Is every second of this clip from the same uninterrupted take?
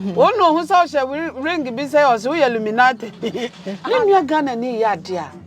no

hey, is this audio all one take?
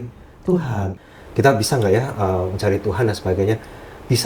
no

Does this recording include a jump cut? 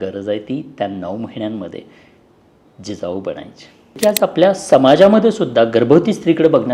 yes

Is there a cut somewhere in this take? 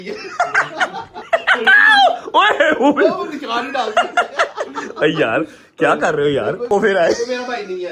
yes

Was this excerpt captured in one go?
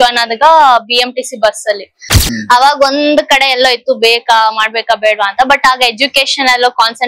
no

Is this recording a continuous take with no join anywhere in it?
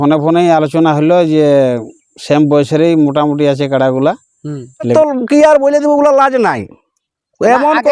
no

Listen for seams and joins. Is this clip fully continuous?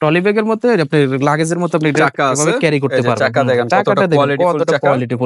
yes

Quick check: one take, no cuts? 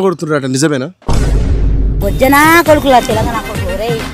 no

